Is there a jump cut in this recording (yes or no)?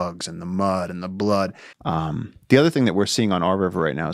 yes